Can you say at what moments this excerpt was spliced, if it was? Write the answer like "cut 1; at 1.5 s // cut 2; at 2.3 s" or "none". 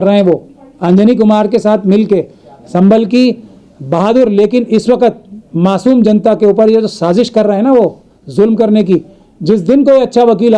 none